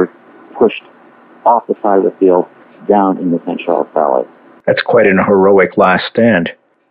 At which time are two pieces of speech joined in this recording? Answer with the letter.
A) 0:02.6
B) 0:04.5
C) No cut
B